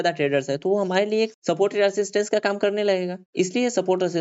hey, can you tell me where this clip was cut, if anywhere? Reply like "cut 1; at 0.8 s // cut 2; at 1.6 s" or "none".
none